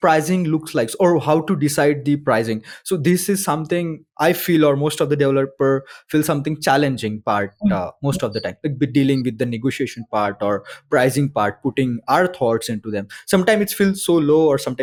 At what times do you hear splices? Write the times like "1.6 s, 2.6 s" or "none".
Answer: none